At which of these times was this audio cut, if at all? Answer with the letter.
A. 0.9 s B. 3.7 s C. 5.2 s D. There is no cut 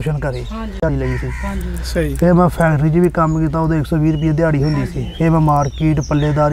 A